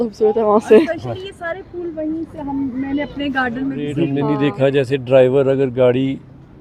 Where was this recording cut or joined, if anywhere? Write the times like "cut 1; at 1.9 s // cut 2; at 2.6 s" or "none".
cut 1; at 4.3 s